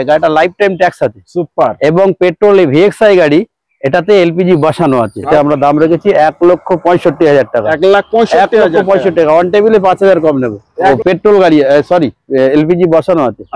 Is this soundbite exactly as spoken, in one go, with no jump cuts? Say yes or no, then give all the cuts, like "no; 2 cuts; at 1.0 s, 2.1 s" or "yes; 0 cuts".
no; 2 cuts; at 5.3 s, 10.9 s